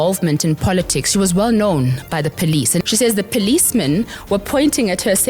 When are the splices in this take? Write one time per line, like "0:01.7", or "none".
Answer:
0:02.8